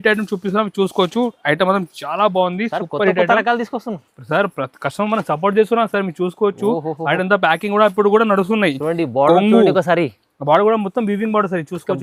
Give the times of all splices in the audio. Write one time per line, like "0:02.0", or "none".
none